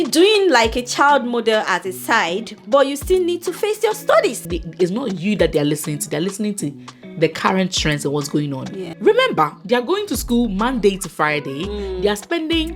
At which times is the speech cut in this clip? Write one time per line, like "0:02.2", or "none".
0:04.4
0:09.0